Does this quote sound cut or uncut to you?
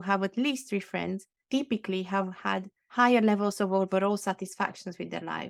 uncut